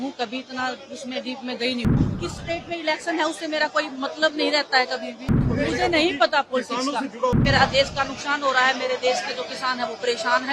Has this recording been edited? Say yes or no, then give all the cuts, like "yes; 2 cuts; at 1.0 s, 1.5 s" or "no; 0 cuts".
yes; 3 cuts; at 1.9 s, 5.4 s, 7.3 s